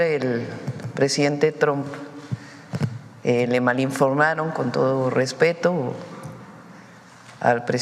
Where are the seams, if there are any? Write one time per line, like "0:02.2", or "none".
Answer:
none